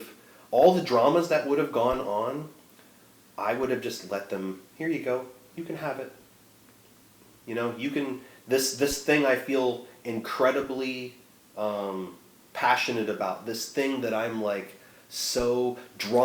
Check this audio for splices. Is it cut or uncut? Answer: uncut